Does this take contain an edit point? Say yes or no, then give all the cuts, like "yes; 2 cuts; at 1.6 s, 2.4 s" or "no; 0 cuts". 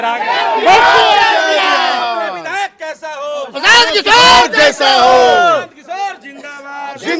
no; 0 cuts